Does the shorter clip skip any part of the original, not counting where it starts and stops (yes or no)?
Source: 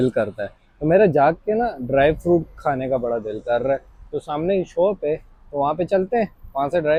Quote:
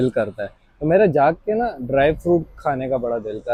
no